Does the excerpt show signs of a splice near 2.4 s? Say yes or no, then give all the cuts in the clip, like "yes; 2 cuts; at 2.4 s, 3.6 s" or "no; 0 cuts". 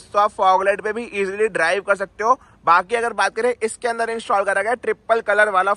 no; 0 cuts